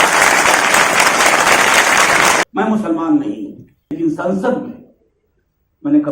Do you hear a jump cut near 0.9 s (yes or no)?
no